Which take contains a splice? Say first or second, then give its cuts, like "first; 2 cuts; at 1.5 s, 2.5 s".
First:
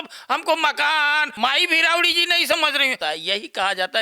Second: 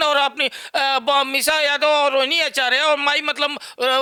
first; 2 cuts; at 1.3 s, 3.0 s